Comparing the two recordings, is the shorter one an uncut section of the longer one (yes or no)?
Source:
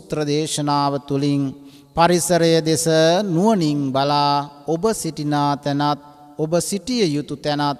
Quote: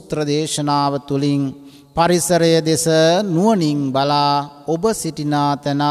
yes